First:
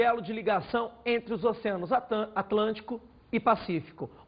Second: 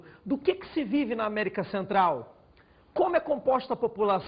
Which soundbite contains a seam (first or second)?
second